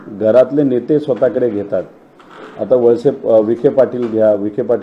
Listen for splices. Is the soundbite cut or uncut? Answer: uncut